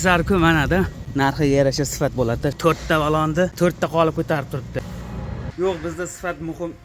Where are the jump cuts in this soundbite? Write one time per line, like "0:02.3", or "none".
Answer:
0:01.0
0:02.6
0:03.5
0:05.4